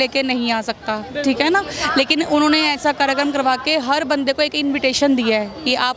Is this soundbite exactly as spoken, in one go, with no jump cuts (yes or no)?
yes